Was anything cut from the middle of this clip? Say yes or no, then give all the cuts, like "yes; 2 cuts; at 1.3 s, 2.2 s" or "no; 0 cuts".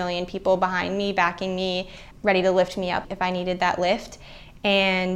no; 0 cuts